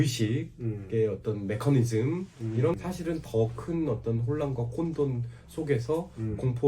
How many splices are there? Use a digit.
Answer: 1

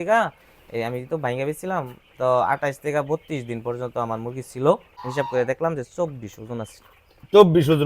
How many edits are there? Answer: 1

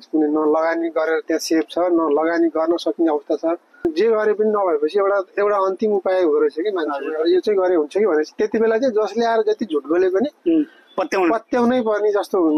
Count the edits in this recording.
1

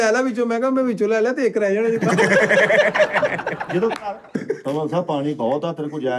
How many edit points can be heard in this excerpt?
1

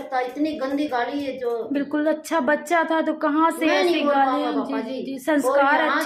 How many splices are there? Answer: 0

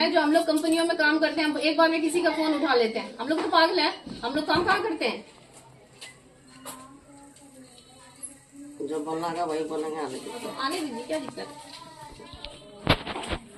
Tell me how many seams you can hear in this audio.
0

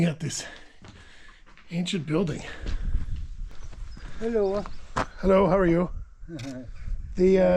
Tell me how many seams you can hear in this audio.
1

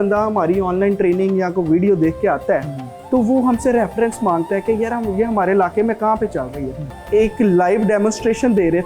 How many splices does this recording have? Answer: 1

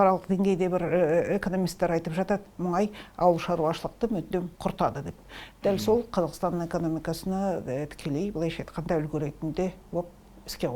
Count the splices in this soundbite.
0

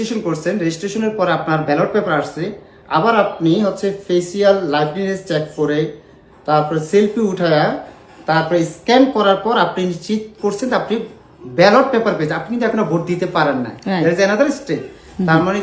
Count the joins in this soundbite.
0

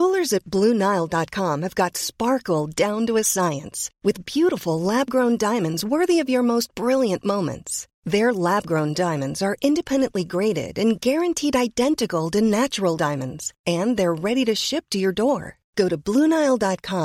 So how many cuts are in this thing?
0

